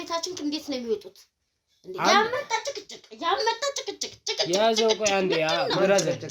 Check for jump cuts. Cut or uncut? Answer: uncut